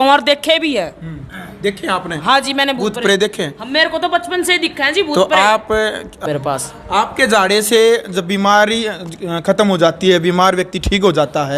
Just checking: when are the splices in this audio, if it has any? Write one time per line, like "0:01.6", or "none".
0:06.2